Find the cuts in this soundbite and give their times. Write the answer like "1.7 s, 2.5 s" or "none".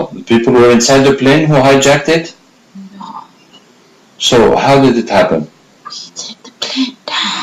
none